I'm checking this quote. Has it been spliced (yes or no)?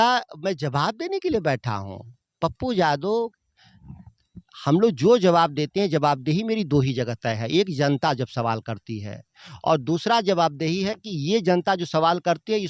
no